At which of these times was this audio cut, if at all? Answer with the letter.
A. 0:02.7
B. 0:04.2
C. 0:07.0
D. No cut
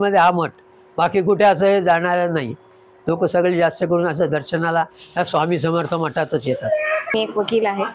C